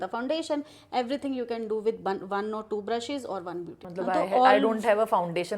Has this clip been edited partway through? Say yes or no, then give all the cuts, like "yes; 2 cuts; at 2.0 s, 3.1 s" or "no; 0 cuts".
yes; 1 cut; at 3.8 s